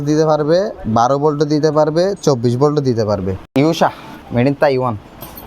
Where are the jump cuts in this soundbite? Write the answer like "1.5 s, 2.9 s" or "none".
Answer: 3.4 s, 4.1 s